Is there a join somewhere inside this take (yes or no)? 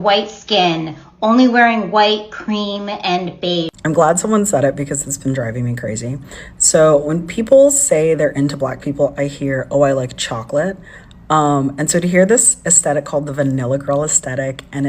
yes